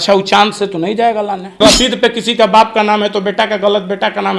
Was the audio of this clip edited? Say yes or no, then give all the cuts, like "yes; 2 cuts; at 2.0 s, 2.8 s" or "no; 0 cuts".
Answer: yes; 1 cut; at 1.6 s